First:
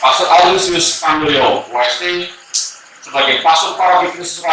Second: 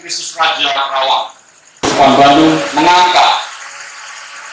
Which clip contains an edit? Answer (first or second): second